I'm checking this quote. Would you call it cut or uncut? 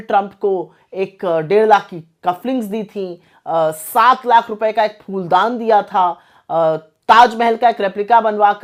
uncut